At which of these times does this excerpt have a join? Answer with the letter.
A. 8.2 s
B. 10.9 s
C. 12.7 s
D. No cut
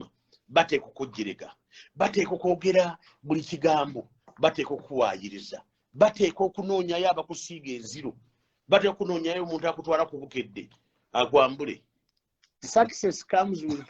C